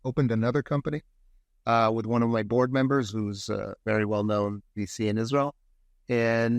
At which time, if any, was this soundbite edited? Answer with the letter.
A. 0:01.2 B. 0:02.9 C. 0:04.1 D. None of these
D